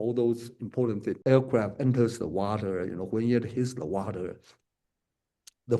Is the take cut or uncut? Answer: cut